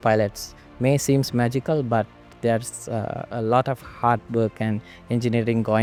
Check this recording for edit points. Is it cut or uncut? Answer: uncut